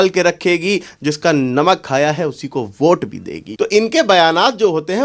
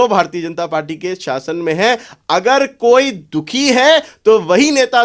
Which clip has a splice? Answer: first; 1 cut; at 3.4 s

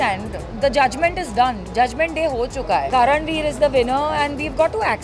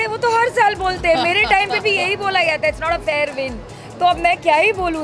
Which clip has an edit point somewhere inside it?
first; 1 cut; at 2.9 s

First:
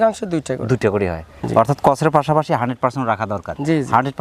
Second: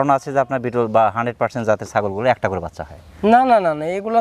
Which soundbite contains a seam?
first; 1 cut; at 1.3 s

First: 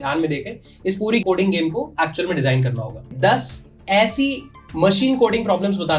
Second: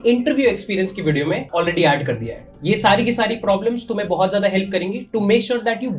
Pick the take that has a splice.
first; 2 cuts; at 1.2 s, 3.1 s

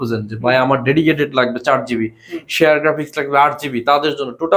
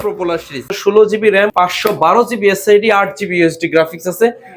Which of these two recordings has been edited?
second; 2 cuts; at 0.8 s, 1.5 s

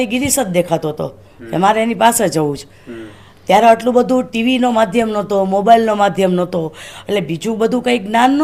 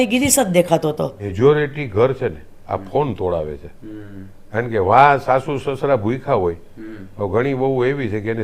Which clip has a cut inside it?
second; 1 cut; at 1.2 s

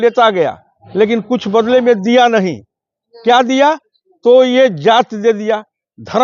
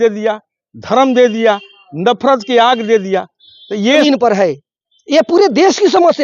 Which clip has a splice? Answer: second; 1 cut; at 4.0 s

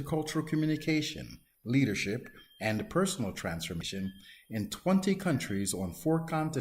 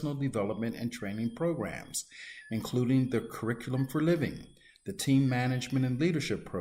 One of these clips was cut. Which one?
first; 1 cut; at 3.9 s

